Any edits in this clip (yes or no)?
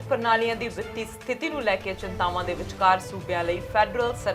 no